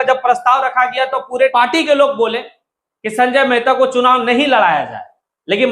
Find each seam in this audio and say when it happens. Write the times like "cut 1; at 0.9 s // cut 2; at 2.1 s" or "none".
cut 1; at 1.5 s